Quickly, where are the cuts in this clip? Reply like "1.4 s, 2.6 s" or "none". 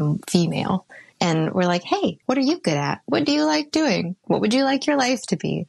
0.9 s, 2.2 s, 4.1 s